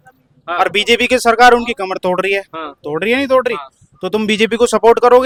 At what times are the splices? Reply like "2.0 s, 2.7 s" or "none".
none